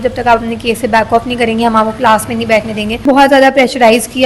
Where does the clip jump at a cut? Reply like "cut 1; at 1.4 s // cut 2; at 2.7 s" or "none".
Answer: cut 1; at 3.0 s